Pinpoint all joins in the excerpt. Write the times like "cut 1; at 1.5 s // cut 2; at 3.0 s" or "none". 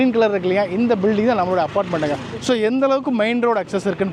none